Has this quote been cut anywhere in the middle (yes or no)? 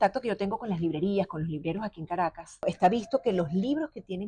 yes